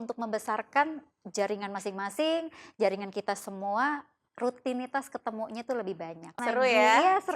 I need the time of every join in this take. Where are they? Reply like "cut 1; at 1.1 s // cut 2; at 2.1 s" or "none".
cut 1; at 6.3 s